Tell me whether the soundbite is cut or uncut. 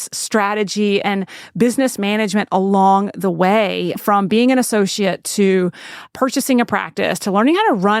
cut